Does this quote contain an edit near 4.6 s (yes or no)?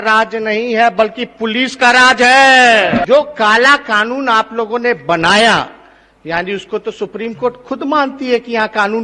no